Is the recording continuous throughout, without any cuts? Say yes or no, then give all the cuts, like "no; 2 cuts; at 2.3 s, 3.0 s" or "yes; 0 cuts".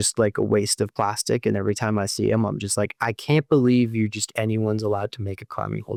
yes; 0 cuts